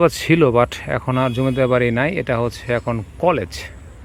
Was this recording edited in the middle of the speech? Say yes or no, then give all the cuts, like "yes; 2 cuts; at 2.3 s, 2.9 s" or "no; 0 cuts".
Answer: no; 0 cuts